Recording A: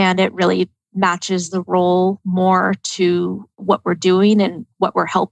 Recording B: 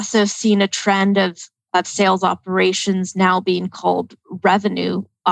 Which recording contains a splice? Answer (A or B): A